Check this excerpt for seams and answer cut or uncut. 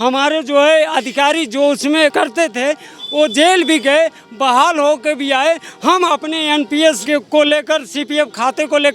cut